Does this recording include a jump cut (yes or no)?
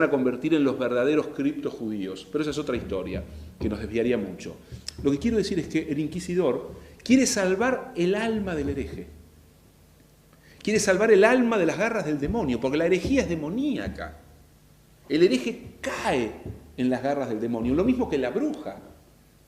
yes